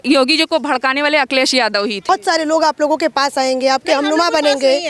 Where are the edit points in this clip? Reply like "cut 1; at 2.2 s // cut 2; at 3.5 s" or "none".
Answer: cut 1; at 2.1 s